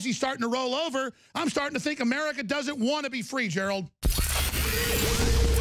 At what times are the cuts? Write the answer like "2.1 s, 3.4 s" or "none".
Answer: 4.0 s